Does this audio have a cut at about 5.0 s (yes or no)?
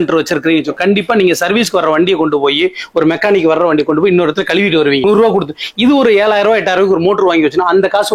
yes